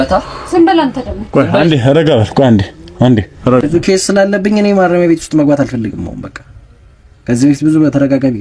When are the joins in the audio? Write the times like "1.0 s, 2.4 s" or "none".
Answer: 3.6 s